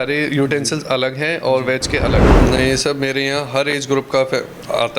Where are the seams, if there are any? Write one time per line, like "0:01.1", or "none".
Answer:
0:02.3